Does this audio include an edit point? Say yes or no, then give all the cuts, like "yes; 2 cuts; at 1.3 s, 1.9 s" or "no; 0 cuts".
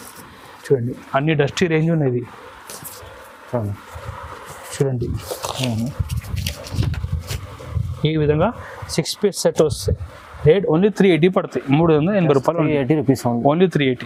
no; 0 cuts